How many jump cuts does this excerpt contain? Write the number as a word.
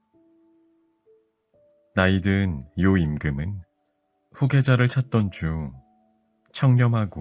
one